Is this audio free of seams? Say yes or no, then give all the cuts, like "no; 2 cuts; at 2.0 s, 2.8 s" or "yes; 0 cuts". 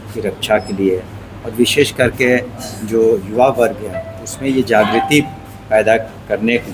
yes; 0 cuts